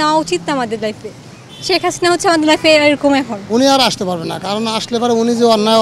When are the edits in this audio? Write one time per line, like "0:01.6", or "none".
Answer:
0:03.4